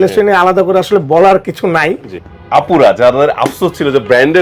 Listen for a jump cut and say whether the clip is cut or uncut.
cut